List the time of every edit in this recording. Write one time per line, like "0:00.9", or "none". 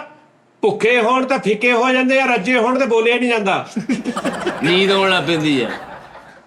none